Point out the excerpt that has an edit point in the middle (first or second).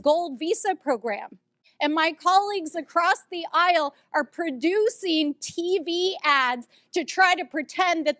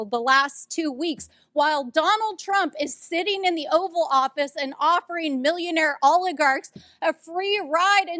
first